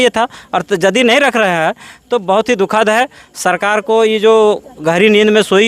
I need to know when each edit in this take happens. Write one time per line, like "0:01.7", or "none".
none

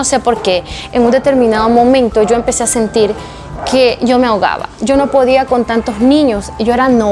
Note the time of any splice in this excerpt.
none

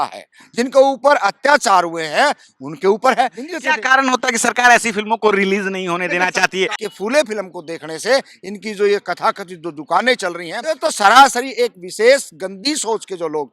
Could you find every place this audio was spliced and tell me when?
0:03.5
0:06.8
0:10.5

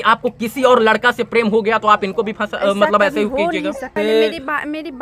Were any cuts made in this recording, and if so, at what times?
0:03.9

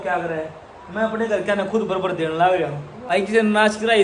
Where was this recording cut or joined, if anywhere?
0:02.9

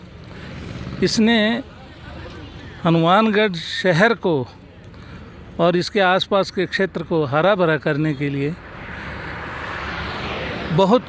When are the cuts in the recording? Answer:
none

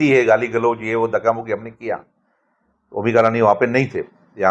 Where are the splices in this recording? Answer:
none

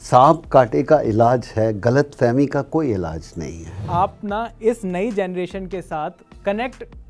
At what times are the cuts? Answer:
0:03.8

